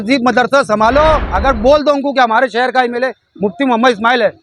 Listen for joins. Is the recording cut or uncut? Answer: cut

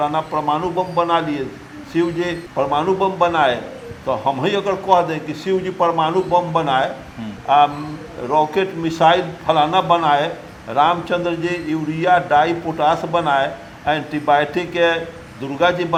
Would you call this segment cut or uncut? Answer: uncut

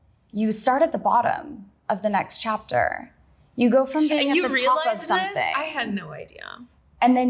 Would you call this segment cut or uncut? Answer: uncut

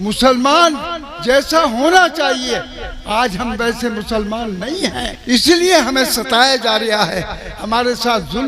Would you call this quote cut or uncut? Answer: cut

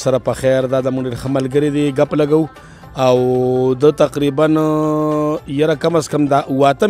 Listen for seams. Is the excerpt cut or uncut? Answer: uncut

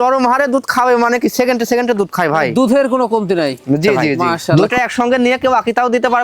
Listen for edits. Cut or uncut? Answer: cut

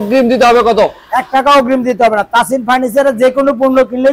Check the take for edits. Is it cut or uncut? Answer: uncut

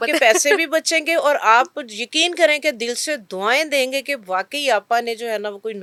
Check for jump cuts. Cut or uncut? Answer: uncut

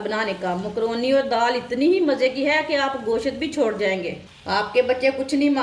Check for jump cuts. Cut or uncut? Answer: uncut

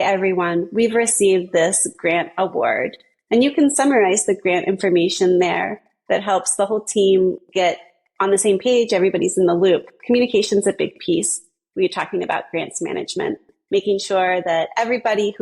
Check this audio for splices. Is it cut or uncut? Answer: uncut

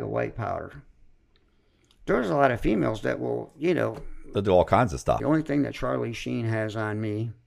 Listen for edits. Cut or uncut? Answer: cut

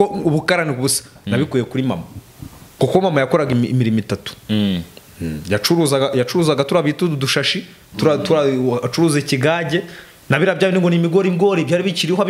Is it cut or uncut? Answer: uncut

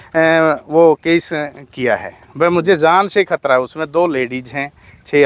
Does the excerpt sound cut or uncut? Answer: uncut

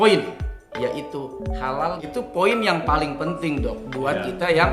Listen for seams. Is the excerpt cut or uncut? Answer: cut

